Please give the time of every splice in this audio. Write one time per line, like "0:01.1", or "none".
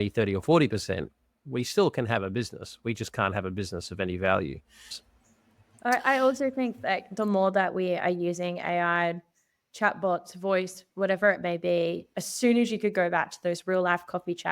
0:04.9
0:12.1